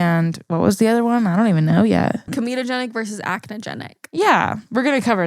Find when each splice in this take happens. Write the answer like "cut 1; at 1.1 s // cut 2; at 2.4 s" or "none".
cut 1; at 2.3 s